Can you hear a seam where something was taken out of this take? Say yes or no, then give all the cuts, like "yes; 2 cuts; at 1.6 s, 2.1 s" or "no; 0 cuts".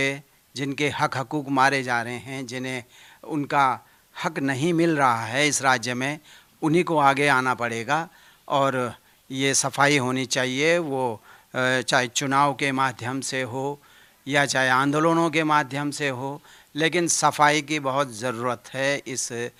no; 0 cuts